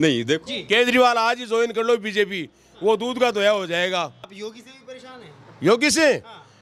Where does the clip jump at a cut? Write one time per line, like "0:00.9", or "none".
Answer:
0:04.3